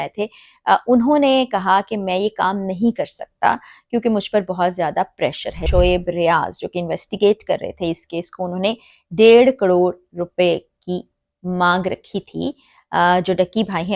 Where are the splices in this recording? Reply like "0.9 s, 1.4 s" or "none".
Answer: 5.6 s